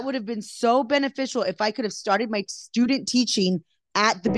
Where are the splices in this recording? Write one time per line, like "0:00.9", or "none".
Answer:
none